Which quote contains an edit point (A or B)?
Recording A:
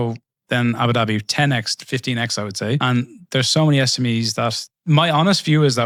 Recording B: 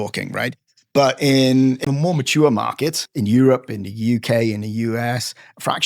B